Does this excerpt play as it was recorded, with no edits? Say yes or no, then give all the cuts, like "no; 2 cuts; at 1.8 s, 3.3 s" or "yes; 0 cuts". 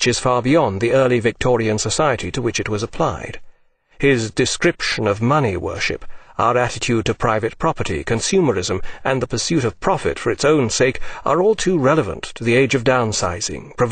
yes; 0 cuts